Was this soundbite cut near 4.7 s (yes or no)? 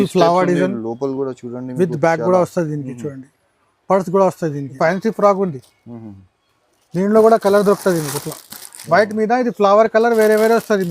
yes